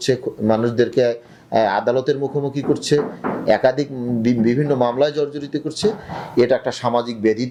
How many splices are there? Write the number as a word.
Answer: zero